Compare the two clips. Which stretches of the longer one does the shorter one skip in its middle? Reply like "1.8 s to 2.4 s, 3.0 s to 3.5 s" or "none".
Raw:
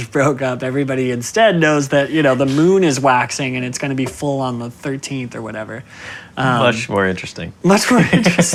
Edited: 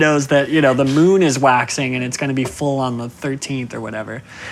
none